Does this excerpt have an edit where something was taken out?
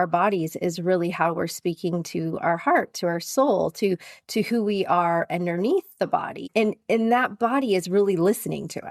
no; 0 cuts

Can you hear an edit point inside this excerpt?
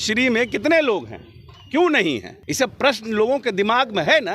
yes; 1 cut; at 2.4 s

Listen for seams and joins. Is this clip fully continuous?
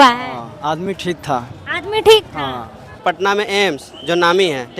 no; 1 cut; at 3.0 s

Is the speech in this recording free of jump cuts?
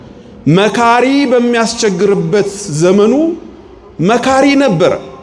yes; 0 cuts

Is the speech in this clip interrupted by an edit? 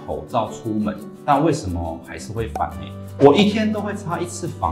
yes; 1 cut; at 3.0 s

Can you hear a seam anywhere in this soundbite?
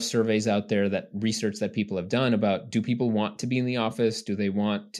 no; 0 cuts

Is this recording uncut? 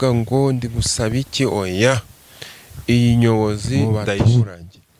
no; 1 cut; at 3.8 s

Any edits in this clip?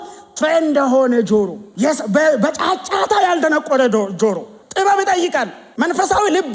yes; 3 cuts; at 1.6 s, 4.5 s, 5.6 s

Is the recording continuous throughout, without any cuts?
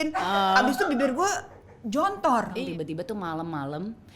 no; 1 cut; at 2.6 s

